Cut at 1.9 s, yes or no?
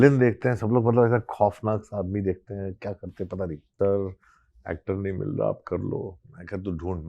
no